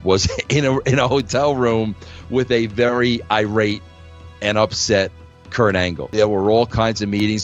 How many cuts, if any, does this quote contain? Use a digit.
1